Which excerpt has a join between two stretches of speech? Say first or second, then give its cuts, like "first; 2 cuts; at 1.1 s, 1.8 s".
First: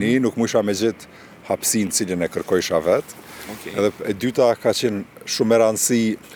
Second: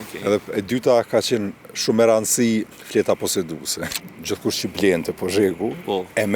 second; 1 cut; at 3.8 s